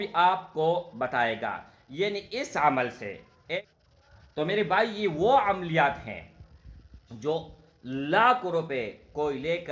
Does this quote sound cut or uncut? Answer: cut